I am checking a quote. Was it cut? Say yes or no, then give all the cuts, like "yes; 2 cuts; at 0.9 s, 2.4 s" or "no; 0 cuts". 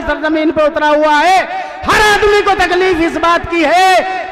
no; 0 cuts